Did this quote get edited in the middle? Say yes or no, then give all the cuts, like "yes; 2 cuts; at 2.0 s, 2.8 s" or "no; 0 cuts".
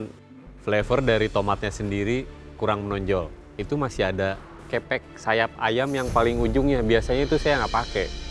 no; 0 cuts